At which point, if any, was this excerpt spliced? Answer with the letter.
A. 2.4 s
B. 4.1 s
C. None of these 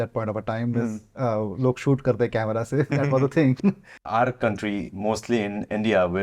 B